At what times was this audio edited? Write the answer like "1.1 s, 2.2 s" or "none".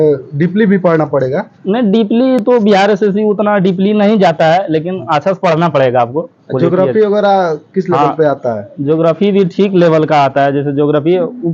none